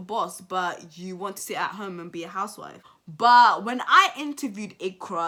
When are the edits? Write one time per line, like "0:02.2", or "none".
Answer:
none